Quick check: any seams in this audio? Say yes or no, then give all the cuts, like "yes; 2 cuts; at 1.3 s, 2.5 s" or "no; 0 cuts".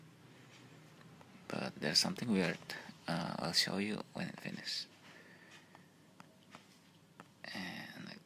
yes; 1 cut; at 3.6 s